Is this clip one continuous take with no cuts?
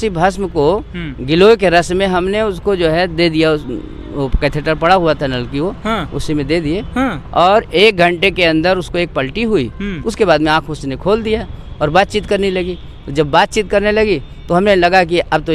yes; 0 cuts

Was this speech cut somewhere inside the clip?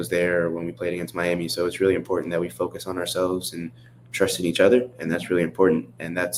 no; 0 cuts

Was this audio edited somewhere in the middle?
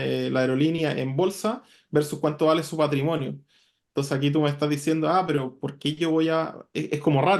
no; 0 cuts

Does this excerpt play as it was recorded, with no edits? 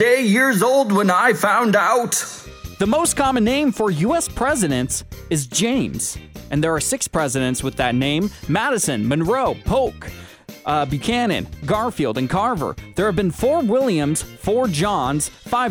yes; 0 cuts

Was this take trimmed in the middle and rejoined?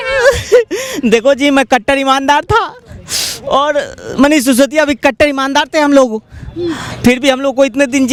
no; 0 cuts

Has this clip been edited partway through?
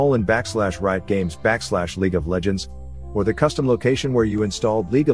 no; 0 cuts

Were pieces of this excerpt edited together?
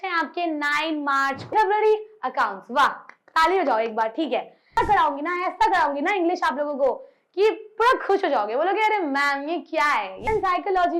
yes; 3 cuts; at 1.5 s, 4.8 s, 10.3 s

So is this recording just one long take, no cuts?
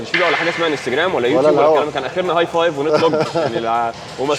yes; 0 cuts

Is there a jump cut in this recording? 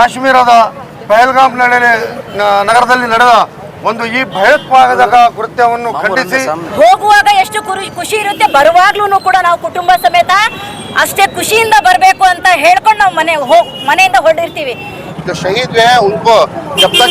yes; 2 cuts; at 6.6 s, 15.0 s

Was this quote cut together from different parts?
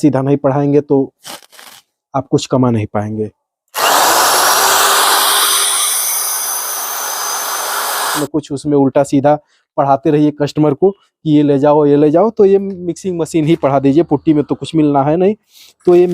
yes; 1 cut; at 8.2 s

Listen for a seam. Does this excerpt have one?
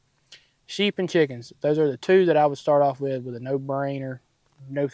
no; 0 cuts

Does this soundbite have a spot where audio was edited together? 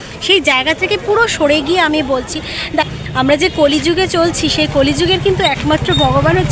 yes; 1 cut; at 2.9 s

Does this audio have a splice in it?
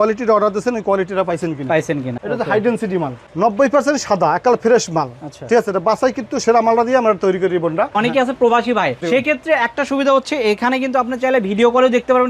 yes; 3 cuts; at 2.1 s, 7.9 s, 9.0 s

